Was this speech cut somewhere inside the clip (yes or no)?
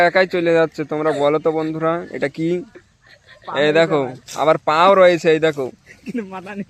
no